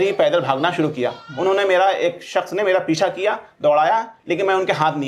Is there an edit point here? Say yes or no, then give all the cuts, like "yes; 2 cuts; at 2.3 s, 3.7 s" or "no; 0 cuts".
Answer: no; 0 cuts